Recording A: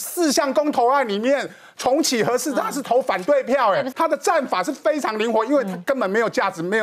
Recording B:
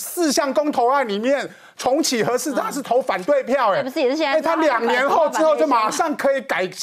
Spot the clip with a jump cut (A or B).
A